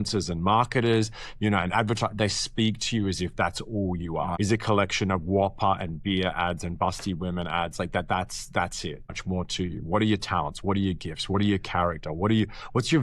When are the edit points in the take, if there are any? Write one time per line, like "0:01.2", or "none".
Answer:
0:04.3
0:09.2